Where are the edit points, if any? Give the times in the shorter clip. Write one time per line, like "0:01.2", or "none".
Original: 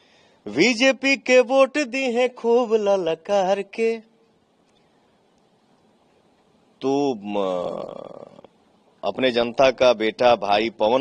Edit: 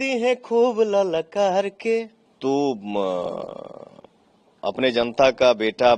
0:02.2